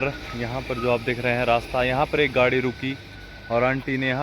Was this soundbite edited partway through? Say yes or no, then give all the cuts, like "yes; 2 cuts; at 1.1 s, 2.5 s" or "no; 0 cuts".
no; 0 cuts